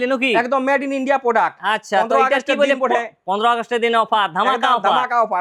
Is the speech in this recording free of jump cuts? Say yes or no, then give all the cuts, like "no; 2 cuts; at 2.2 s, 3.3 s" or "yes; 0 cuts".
yes; 0 cuts